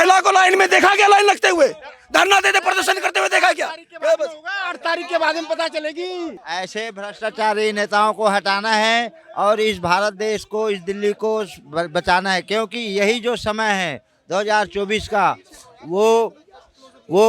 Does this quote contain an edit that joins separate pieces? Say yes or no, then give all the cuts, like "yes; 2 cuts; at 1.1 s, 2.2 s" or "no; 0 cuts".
yes; 1 cut; at 6.4 s